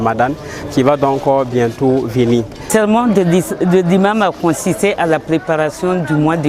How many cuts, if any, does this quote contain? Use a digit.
1